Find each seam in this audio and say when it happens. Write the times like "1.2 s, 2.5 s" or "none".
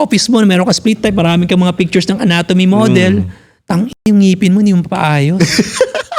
none